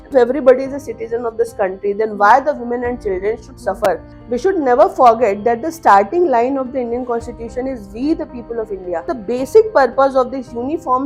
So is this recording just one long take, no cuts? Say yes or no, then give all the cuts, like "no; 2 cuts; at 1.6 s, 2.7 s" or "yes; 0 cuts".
no; 2 cuts; at 4.1 s, 9.1 s